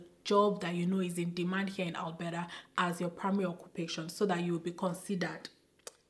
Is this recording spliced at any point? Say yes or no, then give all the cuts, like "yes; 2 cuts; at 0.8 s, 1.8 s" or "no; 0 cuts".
no; 0 cuts